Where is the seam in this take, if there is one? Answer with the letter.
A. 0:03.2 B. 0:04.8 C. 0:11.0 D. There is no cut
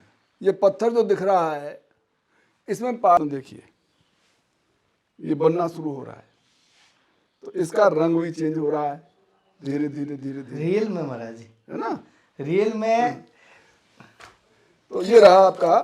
A